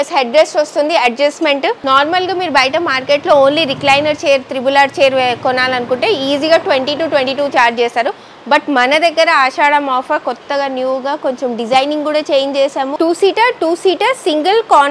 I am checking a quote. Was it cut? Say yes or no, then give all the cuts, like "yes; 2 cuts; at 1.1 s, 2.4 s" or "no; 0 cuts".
yes; 2 cuts; at 1.8 s, 12.9 s